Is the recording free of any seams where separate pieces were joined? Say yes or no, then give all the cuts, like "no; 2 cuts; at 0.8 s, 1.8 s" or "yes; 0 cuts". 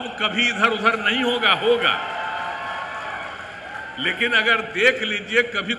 yes; 0 cuts